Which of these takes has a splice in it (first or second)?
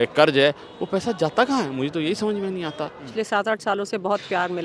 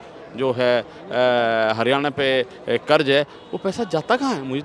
first